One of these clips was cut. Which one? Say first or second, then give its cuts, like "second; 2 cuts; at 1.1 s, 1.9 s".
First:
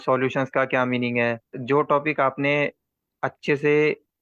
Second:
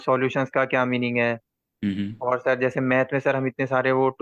first; 1 cut; at 1.6 s